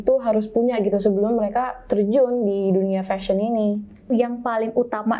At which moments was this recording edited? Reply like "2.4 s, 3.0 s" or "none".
4.1 s